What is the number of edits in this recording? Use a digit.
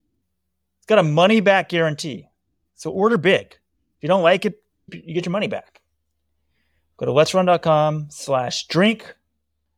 1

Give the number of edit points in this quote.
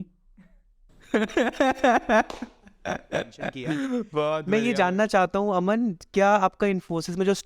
1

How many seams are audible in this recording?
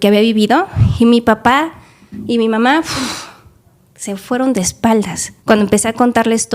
1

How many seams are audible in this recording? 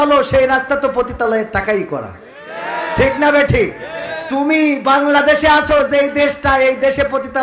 0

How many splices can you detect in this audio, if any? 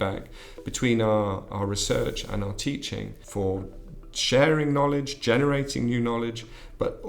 1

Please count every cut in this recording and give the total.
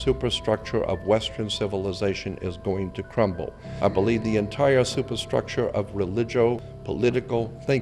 1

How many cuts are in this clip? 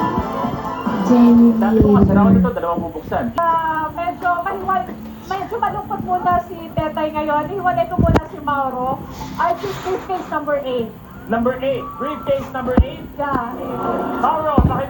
1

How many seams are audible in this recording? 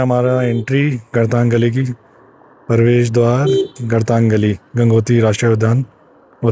0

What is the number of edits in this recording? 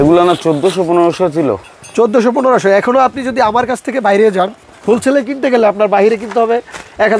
0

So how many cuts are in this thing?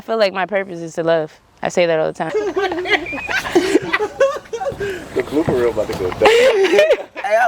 1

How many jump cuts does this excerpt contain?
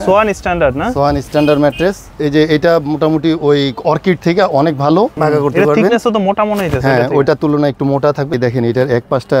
3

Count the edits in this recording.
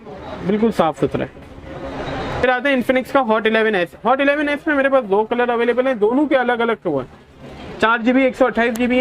1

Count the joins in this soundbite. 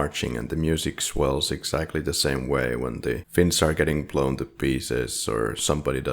1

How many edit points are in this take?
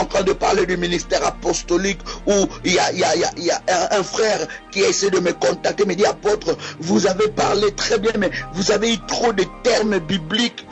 1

